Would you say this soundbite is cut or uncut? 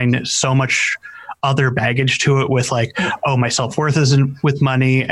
uncut